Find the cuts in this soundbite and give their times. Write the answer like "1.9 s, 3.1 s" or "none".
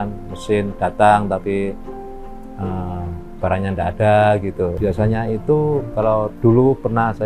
4.8 s